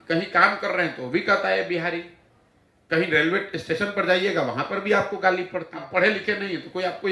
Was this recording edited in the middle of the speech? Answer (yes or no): yes